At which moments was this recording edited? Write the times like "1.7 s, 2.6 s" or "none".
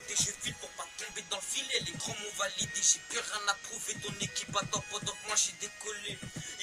none